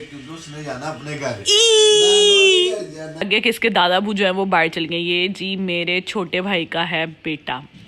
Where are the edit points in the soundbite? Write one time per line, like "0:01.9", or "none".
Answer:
0:03.3